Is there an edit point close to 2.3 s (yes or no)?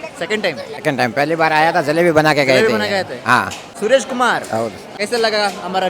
no